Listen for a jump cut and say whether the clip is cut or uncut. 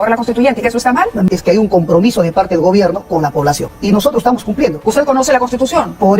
cut